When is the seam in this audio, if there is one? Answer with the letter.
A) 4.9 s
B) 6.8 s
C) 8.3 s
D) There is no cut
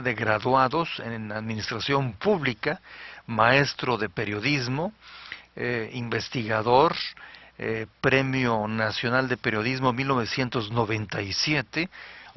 C